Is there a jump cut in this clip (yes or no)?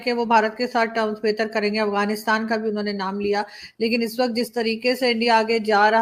no